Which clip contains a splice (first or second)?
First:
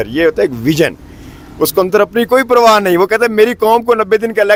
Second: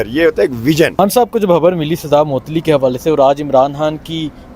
second